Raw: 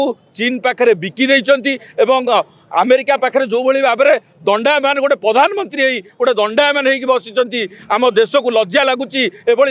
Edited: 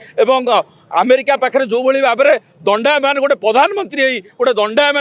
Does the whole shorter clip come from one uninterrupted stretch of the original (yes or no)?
yes